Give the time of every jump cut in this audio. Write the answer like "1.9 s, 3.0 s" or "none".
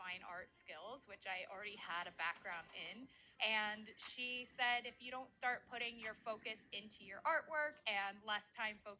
3.2 s